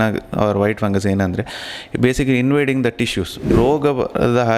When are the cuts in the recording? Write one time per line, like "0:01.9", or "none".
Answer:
0:03.5